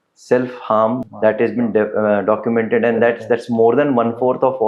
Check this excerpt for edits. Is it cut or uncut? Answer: cut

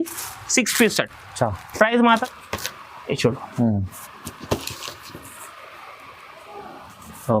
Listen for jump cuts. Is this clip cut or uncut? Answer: cut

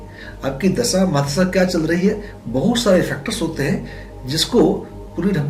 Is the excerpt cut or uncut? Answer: uncut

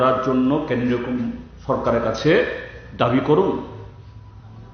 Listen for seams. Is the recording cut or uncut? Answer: cut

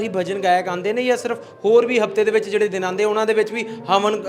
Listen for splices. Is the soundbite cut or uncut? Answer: uncut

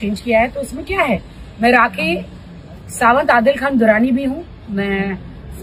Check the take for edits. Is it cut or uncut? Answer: uncut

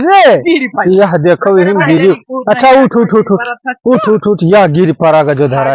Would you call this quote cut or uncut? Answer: uncut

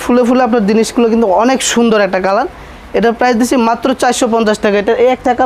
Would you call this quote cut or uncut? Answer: uncut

